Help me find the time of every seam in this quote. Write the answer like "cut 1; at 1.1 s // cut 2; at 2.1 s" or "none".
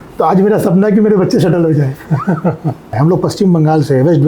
cut 1; at 3.0 s